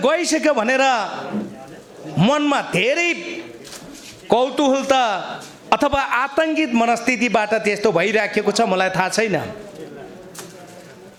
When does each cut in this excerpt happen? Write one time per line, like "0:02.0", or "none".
none